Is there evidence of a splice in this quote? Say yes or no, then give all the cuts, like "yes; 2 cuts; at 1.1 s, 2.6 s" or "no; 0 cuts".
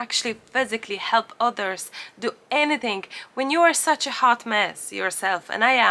no; 0 cuts